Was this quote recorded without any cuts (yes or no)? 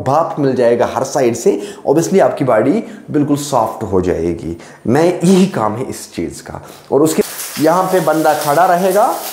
no